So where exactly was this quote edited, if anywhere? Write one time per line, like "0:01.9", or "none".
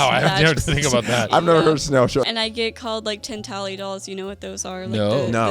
0:02.2